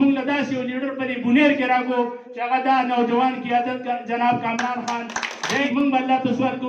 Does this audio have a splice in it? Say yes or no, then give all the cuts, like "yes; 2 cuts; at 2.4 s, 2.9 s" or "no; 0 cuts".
yes; 1 cut; at 5.6 s